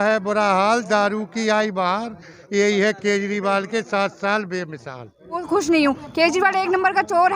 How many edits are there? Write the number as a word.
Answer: one